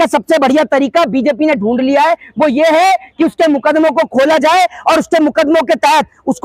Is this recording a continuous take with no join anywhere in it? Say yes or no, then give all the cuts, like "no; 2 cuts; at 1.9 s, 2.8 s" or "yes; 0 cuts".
yes; 0 cuts